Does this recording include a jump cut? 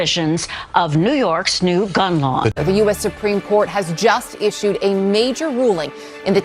yes; 1 cut; at 2.6 s

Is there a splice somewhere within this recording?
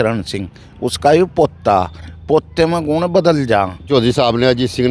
yes; 1 cut; at 3.8 s

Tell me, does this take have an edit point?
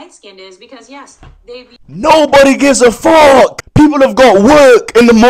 yes; 2 cuts; at 1.7 s, 3.6 s

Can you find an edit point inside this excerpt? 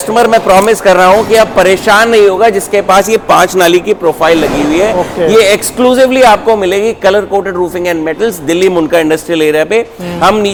no; 0 cuts

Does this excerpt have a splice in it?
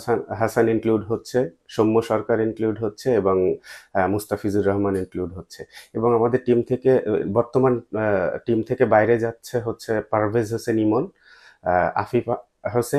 no; 0 cuts

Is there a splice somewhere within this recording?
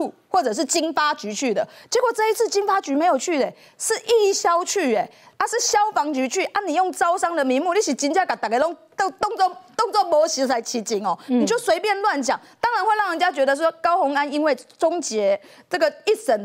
no; 0 cuts

